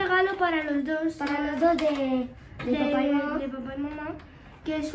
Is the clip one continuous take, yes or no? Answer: yes